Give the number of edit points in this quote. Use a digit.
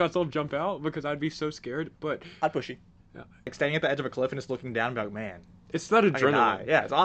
1